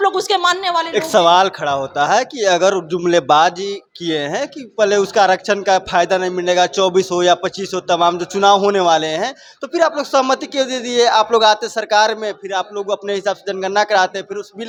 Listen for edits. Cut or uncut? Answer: uncut